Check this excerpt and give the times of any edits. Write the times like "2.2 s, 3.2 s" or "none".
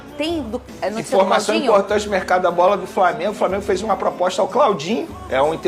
none